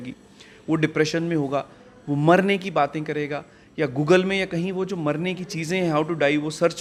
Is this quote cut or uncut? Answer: uncut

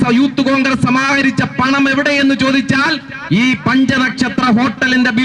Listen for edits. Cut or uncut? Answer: uncut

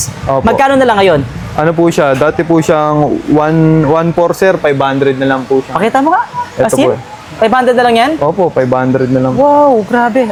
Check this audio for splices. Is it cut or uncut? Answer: uncut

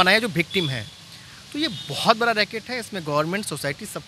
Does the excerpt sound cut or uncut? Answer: uncut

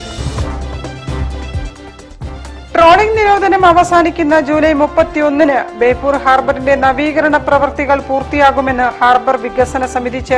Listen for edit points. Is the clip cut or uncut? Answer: cut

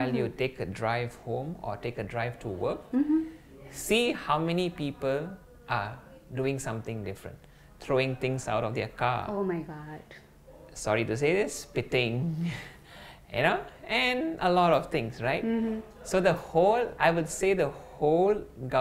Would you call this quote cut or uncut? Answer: uncut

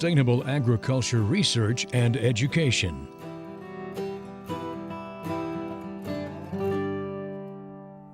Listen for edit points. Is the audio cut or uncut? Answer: cut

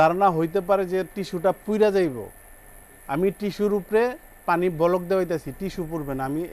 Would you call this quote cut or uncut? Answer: uncut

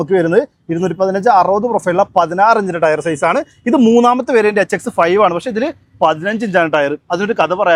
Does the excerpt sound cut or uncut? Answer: uncut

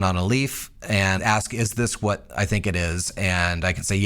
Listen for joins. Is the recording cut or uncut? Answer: cut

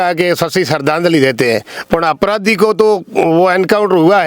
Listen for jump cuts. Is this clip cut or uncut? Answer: uncut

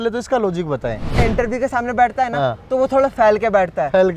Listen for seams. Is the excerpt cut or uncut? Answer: cut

